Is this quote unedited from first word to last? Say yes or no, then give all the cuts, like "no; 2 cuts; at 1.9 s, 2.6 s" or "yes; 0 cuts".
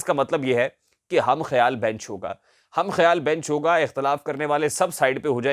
yes; 0 cuts